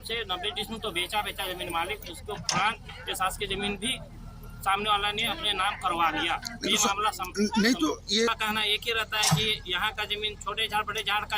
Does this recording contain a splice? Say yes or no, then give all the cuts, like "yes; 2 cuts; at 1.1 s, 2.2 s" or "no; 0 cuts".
yes; 1 cut; at 8.3 s